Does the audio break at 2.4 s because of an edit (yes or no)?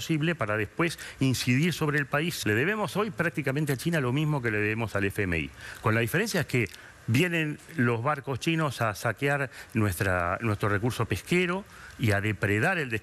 yes